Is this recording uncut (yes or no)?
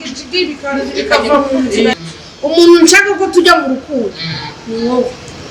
no